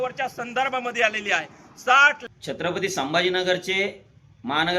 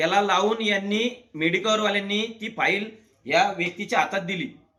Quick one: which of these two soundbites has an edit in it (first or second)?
first